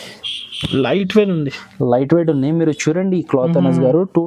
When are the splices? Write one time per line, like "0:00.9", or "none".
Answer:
none